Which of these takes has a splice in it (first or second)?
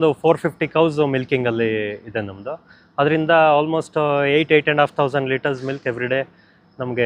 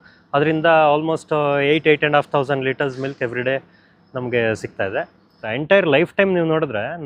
second